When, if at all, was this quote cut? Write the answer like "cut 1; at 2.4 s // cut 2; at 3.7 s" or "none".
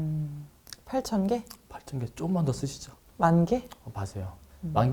none